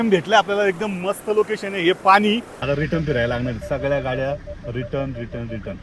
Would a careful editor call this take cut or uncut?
cut